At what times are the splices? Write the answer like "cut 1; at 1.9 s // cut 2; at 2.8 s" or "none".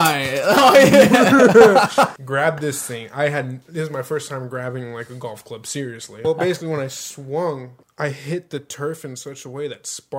cut 1; at 2.2 s // cut 2; at 6.2 s // cut 3; at 7.8 s